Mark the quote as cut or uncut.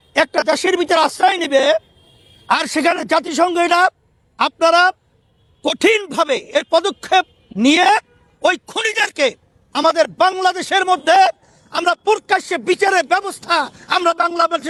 uncut